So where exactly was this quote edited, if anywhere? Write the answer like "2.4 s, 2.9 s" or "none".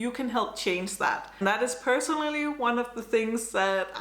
1.3 s